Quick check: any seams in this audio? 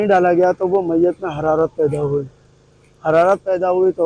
no; 0 cuts

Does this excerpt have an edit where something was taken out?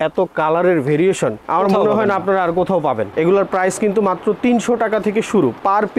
yes; 1 cut; at 3.1 s

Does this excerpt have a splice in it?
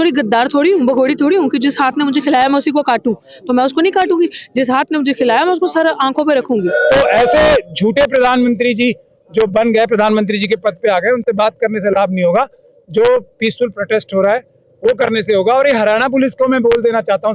yes; 1 cut; at 6.7 s

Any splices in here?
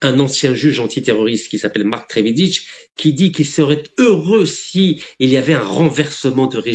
no; 0 cuts

